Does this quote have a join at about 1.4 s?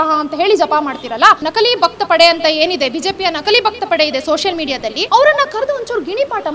yes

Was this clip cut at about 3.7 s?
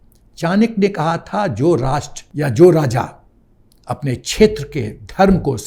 no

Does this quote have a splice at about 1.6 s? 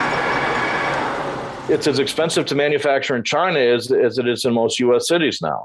yes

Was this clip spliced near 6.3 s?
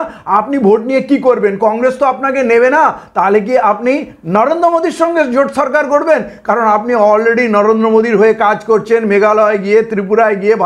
no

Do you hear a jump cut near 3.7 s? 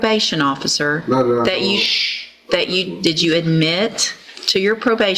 no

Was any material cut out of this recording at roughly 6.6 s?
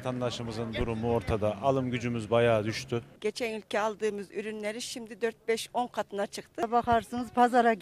yes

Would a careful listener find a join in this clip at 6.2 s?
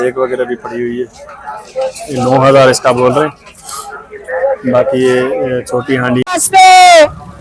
yes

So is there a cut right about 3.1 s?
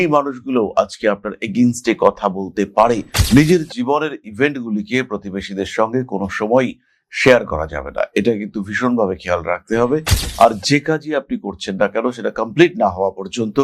yes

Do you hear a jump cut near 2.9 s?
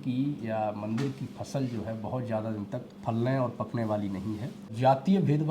yes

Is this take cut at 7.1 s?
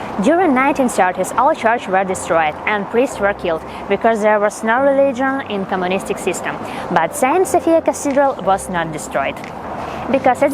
no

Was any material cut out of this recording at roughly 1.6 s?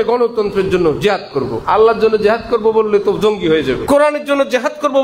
yes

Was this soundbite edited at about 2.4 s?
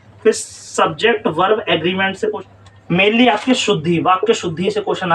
yes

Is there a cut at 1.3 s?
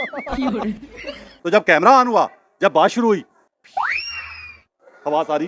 yes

